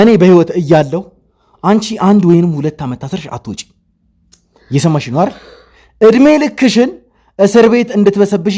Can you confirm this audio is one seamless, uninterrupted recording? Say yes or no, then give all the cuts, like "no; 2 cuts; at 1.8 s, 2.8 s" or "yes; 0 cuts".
yes; 0 cuts